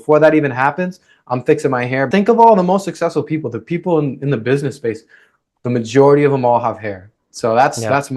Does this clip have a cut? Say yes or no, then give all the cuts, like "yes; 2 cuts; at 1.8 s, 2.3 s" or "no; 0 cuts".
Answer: yes; 1 cut; at 2.1 s